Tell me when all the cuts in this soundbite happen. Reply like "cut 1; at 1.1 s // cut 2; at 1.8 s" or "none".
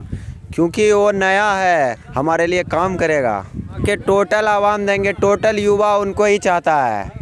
cut 1; at 3.8 s